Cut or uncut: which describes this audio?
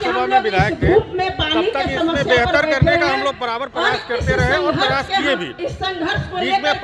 uncut